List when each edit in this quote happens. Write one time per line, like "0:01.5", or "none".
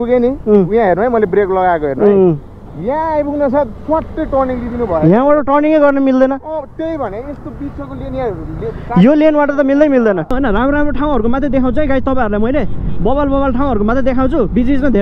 0:10.3